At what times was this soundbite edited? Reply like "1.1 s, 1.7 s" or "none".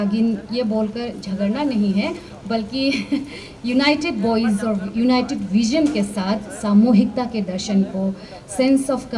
none